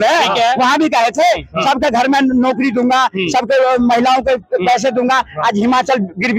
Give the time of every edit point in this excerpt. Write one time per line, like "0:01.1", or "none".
none